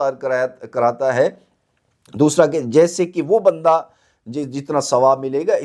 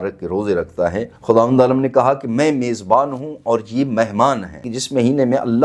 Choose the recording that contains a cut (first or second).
second